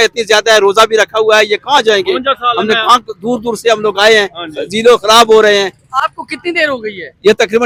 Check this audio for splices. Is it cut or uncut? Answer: uncut